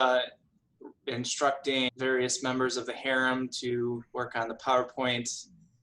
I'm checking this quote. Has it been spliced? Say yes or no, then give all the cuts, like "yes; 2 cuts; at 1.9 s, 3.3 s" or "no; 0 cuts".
yes; 1 cut; at 1.9 s